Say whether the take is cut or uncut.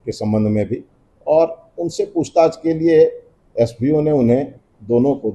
uncut